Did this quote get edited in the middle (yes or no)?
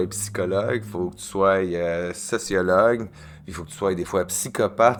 no